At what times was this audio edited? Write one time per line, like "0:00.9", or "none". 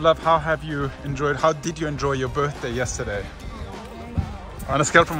none